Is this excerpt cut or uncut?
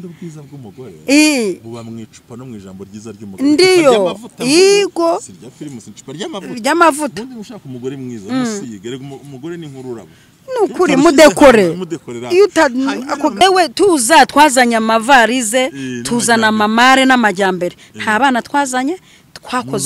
cut